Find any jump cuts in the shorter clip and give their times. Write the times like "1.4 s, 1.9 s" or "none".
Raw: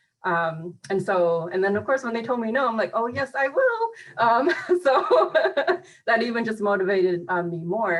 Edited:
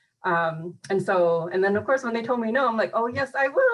none